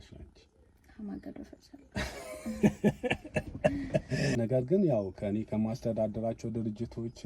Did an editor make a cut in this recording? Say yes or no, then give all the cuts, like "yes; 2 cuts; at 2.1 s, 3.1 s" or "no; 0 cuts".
yes; 1 cut; at 4.4 s